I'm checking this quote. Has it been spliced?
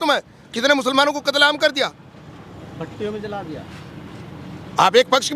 no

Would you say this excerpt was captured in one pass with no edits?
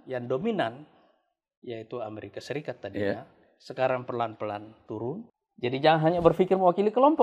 no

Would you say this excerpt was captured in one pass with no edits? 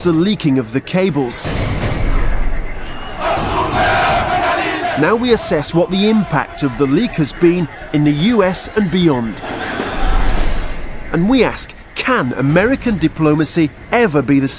yes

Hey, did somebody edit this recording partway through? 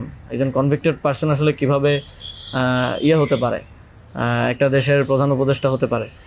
no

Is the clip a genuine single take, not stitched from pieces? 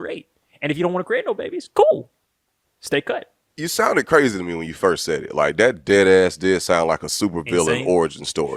no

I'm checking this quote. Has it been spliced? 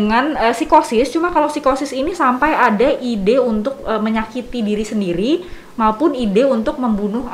no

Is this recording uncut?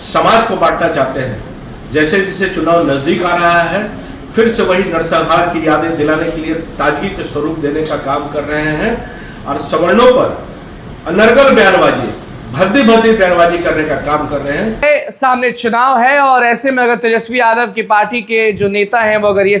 no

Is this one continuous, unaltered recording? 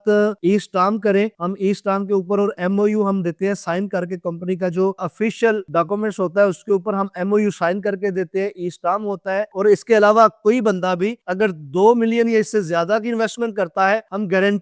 yes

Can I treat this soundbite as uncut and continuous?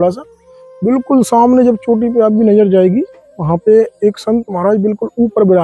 yes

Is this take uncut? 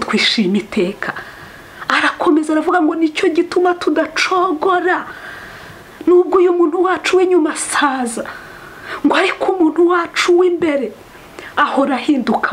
yes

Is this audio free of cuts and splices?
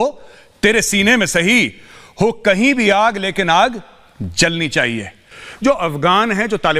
no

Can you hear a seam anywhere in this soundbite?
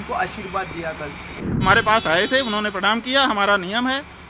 yes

